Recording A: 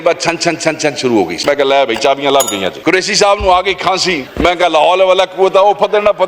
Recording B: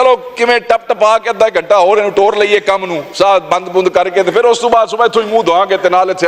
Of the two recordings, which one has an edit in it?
A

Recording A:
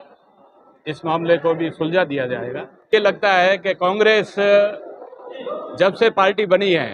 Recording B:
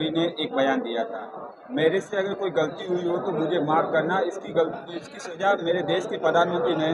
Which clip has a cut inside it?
A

